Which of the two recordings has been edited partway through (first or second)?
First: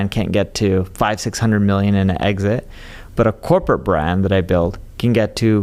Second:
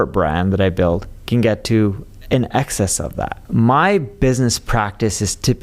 second